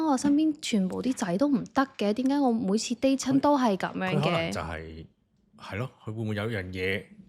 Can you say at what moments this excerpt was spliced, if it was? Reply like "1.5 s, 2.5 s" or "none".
none

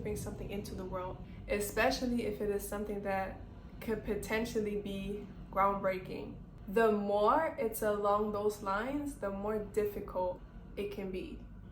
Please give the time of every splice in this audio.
1.2 s, 10.6 s

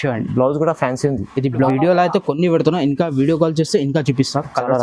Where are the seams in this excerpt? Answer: 1.7 s

